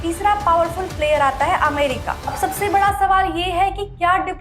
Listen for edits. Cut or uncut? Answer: cut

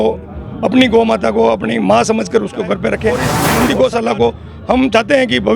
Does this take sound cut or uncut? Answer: cut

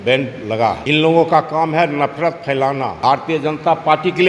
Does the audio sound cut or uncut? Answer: cut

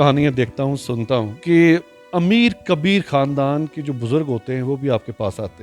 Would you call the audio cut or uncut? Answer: cut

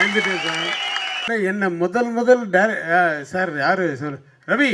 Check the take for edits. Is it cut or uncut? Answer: cut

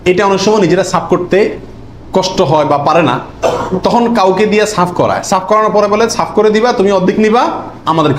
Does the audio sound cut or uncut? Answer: uncut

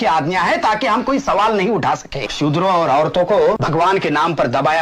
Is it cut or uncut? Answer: cut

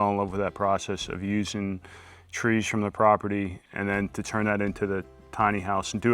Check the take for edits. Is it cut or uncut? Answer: cut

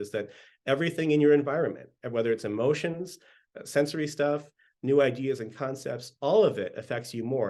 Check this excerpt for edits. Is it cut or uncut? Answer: uncut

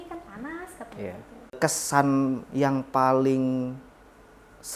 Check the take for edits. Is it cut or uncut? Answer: cut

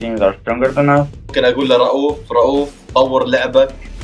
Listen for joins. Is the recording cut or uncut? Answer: cut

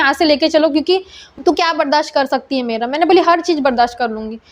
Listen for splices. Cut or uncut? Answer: cut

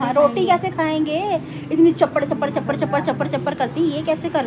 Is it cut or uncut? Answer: uncut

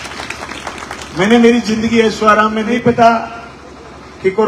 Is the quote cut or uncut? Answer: cut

